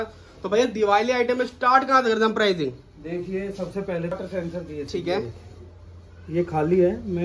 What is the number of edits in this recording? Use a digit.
1